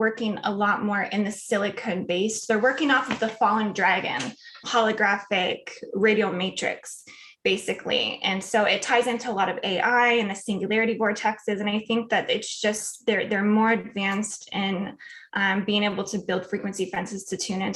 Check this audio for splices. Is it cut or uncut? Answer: cut